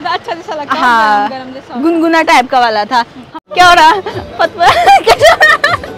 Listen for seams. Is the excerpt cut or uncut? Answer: cut